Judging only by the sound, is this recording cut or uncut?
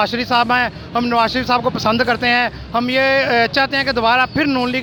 uncut